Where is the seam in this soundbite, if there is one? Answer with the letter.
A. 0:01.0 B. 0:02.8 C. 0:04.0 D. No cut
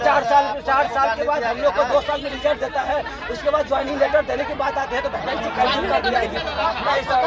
D